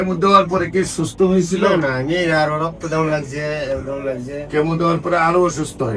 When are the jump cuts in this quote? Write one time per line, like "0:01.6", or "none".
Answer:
none